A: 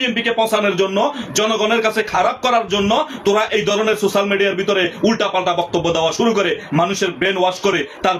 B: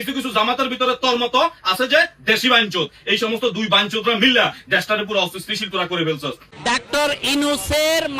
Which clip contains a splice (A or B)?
B